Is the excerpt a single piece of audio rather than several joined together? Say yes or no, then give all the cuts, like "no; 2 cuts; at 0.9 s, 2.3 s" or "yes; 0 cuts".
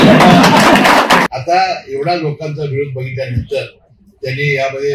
no; 1 cut; at 1.2 s